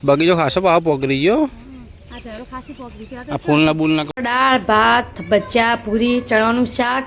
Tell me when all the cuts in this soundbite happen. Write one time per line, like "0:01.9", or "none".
0:04.1